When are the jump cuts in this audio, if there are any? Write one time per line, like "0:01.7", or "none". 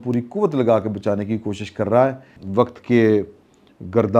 0:02.3